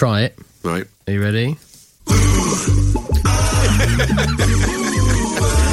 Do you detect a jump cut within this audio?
no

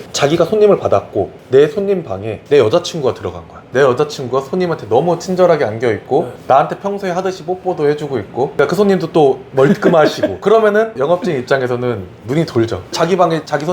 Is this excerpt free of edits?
no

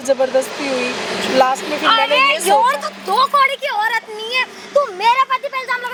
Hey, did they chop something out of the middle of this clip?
no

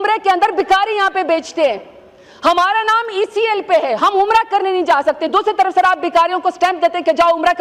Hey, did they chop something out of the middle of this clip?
no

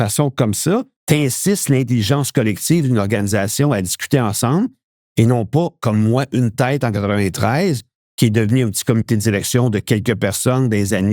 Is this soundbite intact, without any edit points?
no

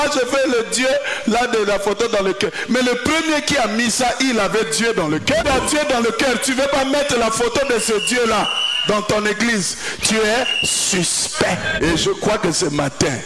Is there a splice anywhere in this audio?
yes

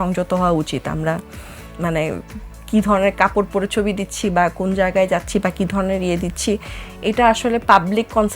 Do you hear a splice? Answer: no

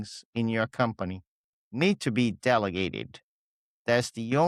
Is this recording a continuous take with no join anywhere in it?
yes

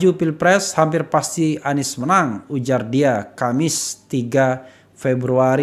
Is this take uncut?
yes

